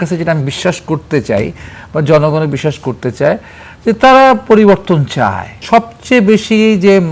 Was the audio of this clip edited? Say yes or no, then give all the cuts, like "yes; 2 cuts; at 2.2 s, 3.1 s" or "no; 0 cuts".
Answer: yes; 1 cut; at 5.5 s